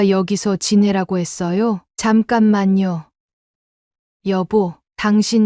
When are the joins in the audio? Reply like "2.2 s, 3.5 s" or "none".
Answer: 1.9 s, 3.1 s